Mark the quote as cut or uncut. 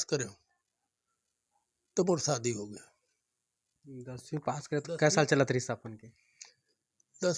uncut